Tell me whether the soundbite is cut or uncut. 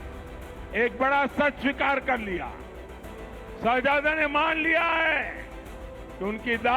uncut